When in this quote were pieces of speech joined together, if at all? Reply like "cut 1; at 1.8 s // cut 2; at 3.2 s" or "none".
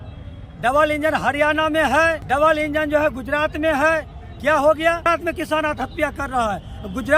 cut 1; at 2.2 s // cut 2; at 5.1 s